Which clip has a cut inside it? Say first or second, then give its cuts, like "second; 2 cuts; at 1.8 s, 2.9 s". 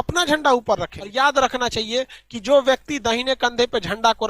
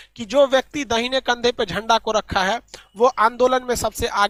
first; 1 cut; at 1.0 s